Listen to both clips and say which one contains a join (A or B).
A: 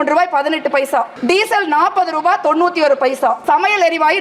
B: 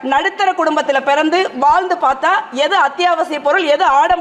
A